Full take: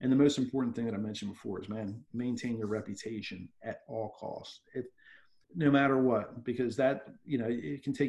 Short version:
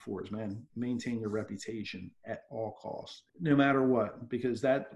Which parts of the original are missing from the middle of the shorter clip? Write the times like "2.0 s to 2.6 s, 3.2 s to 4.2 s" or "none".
4.5 s to 5.3 s

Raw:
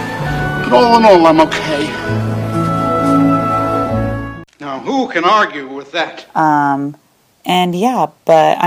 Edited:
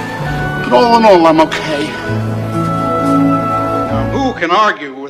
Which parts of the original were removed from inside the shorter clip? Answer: 4.1 s to 4.8 s

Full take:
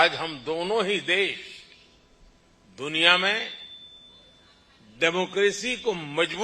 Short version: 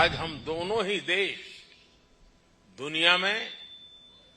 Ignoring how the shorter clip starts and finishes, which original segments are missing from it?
none

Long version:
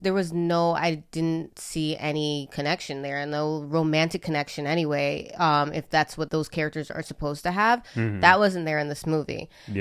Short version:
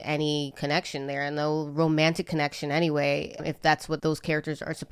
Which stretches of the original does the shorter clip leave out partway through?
5.4 s to 5.7 s

